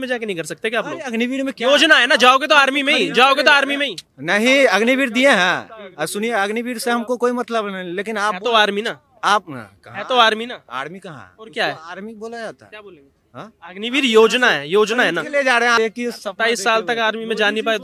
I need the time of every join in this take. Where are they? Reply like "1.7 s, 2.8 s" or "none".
15.7 s